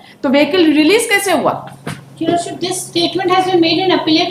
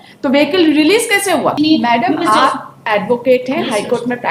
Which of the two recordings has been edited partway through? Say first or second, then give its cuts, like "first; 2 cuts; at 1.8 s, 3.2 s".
second; 1 cut; at 1.6 s